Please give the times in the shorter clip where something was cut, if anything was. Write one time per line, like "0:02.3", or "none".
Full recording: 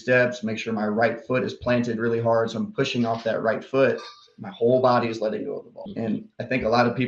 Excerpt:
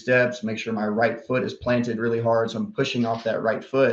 none